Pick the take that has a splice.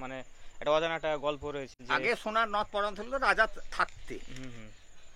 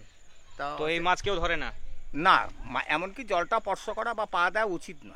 first; 1 cut; at 1.8 s

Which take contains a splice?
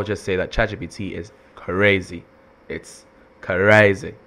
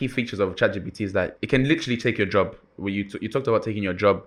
second; 1 cut; at 1.4 s

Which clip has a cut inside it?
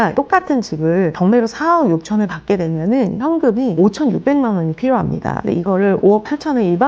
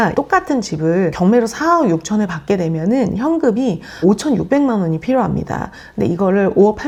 first; 2 cuts; at 3.7 s, 5.3 s

